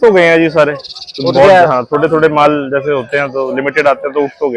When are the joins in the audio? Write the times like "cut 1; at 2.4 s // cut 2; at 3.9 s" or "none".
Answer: none